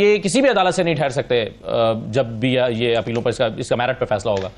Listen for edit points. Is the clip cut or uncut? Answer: uncut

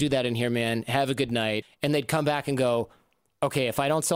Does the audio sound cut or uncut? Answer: cut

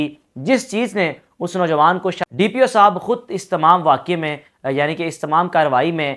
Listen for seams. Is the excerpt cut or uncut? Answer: cut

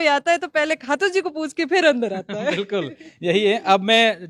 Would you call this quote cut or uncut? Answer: uncut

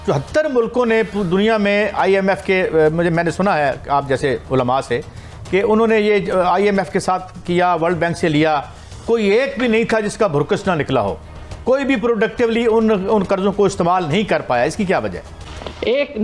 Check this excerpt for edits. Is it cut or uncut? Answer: uncut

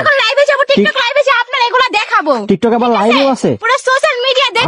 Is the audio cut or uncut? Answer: uncut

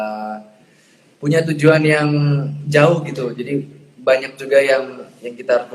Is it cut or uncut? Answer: uncut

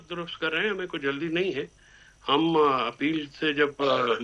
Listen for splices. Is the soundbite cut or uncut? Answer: uncut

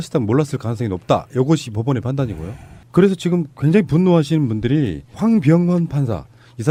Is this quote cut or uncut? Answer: uncut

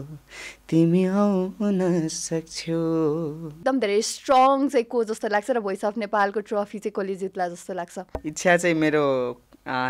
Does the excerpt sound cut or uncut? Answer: cut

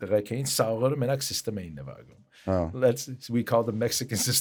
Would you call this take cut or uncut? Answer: uncut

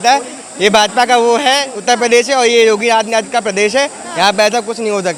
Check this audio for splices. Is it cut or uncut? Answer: uncut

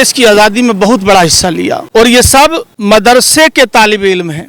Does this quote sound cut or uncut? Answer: cut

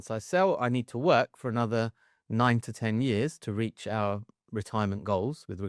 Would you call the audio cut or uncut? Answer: uncut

